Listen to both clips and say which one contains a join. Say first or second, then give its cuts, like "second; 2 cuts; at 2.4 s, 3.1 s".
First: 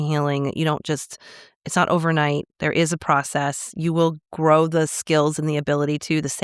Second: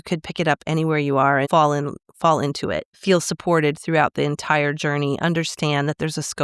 second; 2 cuts; at 1.5 s, 2.9 s